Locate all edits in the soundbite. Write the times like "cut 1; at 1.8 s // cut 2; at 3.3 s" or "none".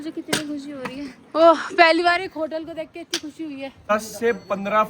cut 1; at 3.9 s